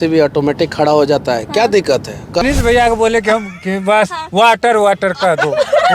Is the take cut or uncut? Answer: cut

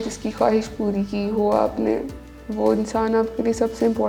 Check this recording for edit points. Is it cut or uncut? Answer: uncut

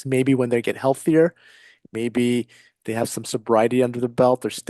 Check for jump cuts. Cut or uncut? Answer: uncut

